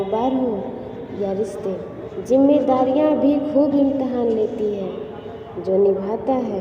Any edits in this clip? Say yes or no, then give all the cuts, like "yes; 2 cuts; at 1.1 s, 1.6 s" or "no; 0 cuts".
yes; 1 cut; at 2.0 s